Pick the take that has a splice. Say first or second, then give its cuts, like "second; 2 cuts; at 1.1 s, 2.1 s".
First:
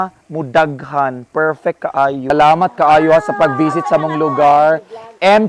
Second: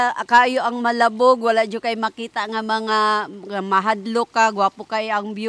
first; 1 cut; at 2.3 s